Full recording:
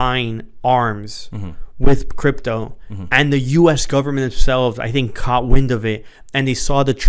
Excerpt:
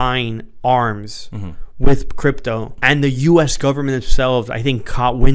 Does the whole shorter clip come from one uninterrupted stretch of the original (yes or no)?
no